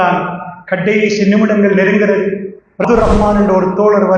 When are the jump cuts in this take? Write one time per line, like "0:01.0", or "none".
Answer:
0:02.8